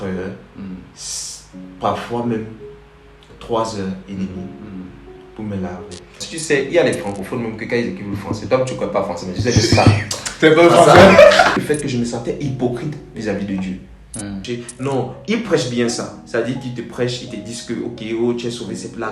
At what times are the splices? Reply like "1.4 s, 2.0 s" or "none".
6.2 s, 11.6 s, 14.4 s